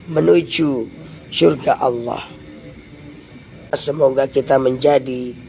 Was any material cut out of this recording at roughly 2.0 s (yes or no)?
no